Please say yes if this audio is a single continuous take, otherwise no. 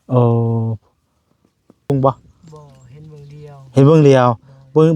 no